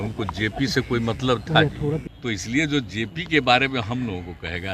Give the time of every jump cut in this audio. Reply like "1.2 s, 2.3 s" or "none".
2.1 s